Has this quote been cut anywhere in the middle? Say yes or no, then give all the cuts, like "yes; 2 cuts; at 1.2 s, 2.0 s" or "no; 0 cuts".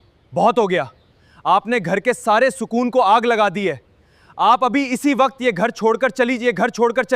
no; 0 cuts